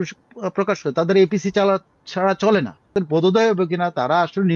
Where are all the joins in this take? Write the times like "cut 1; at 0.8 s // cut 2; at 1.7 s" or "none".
cut 1; at 2.9 s